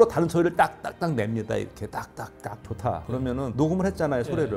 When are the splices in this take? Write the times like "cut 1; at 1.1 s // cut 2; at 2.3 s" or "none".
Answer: cut 1; at 2.5 s

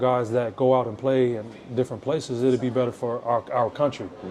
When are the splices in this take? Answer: none

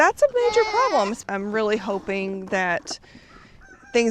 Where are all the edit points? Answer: cut 1; at 1.2 s

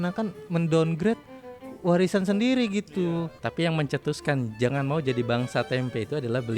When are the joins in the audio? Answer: cut 1; at 2.9 s

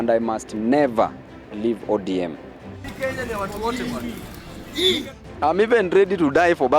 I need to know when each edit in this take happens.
cut 1; at 2.8 s // cut 2; at 5.2 s

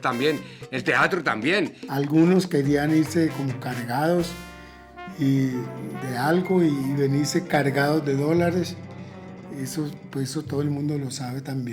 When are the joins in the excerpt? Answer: cut 1; at 1.8 s

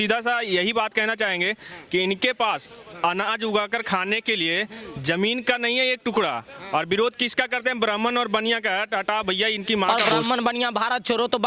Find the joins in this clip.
cut 1; at 9.8 s

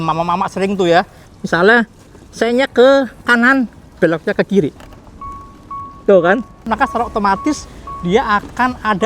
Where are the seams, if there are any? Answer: cut 1; at 1.2 s // cut 2; at 4.7 s // cut 3; at 6.7 s

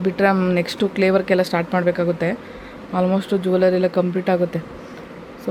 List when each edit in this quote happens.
none

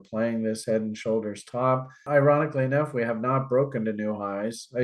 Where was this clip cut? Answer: cut 1; at 2.0 s

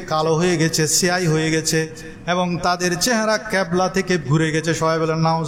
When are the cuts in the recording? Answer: cut 1; at 4.2 s

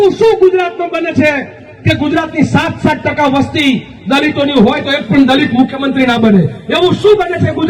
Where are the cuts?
none

